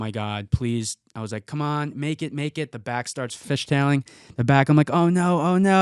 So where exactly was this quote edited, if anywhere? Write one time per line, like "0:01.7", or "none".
0:03.4

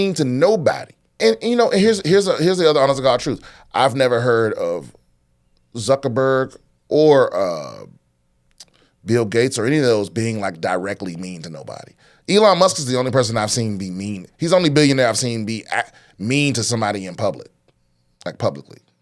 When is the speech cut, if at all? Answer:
0:01.2

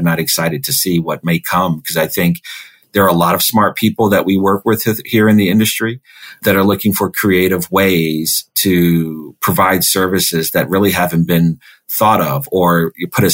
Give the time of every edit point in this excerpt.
0:01.2

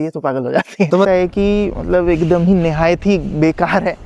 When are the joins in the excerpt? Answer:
0:01.1

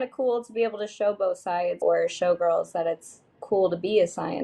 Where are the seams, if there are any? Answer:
0:01.8

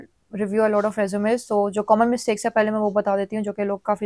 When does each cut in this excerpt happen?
none

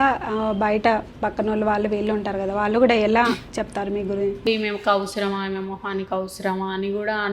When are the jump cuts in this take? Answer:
0:04.5

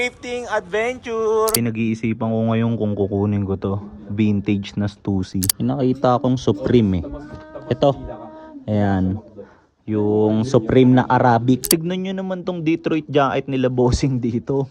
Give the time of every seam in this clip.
0:01.6
0:05.5
0:11.6

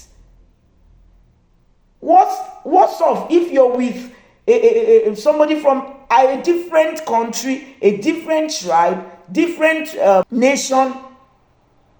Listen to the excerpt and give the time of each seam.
0:10.3

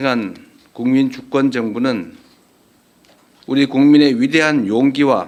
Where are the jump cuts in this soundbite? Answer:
none

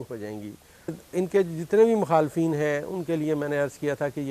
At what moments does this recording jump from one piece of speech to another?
0:00.9

